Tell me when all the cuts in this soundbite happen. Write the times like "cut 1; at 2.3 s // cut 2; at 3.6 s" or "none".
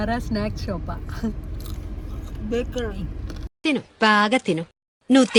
none

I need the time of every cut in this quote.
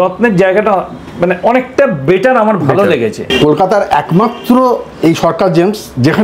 cut 1; at 3.3 s

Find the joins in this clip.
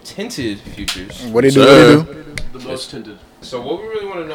cut 1; at 3.4 s

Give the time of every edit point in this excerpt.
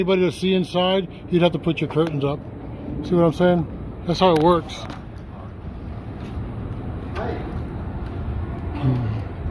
none

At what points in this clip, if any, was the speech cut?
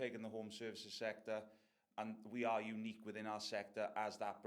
cut 1; at 1.8 s

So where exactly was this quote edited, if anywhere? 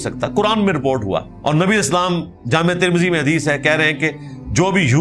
cut 1; at 1.3 s

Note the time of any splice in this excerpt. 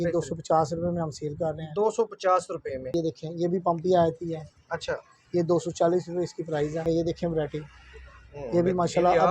cut 1; at 2.9 s // cut 2; at 6.8 s

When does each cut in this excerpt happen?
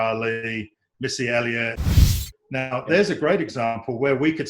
cut 1; at 1.9 s

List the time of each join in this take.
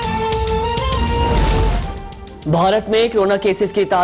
none

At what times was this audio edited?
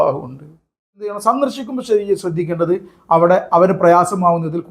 cut 1; at 1.2 s

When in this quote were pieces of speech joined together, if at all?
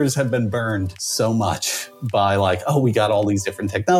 cut 1; at 1.0 s

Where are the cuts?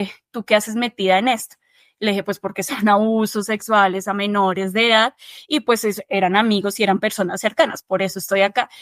none

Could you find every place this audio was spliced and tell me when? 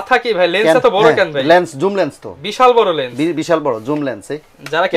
none

